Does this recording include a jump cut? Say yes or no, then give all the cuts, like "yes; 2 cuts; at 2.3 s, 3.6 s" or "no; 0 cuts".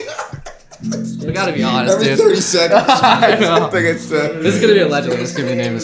no; 0 cuts